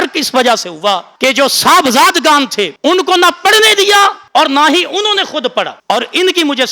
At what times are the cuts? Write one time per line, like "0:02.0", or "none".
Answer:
0:01.1
0:02.7
0:04.2
0:05.8